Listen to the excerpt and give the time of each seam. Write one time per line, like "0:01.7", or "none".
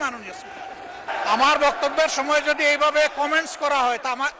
0:01.1